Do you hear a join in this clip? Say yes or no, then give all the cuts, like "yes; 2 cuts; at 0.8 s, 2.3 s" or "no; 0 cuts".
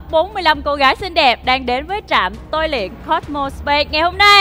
no; 0 cuts